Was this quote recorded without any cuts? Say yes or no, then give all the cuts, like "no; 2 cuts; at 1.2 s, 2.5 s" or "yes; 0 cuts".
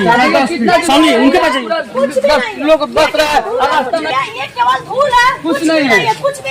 no; 1 cut; at 4.1 s